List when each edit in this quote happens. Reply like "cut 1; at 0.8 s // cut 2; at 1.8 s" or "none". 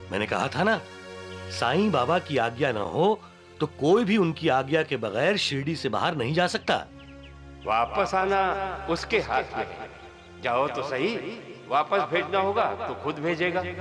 none